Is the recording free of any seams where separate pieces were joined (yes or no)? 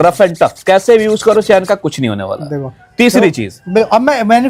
yes